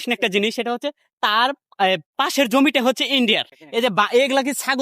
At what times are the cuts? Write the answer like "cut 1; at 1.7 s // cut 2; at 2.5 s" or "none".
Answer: cut 1; at 3.5 s

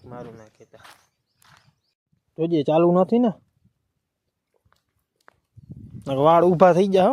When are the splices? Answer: cut 1; at 2.1 s

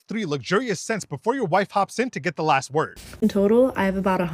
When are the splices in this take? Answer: cut 1; at 2.9 s

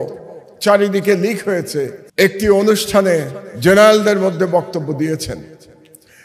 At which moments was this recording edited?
cut 1; at 2.0 s

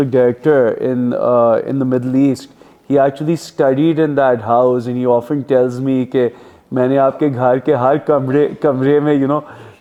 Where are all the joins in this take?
none

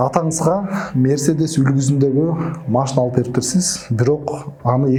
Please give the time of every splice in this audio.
none

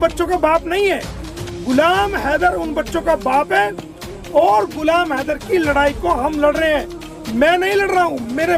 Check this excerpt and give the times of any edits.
none

